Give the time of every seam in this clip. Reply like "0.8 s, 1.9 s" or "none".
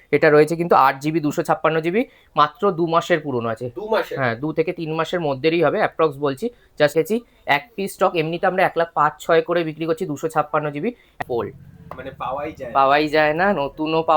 6.9 s, 11.2 s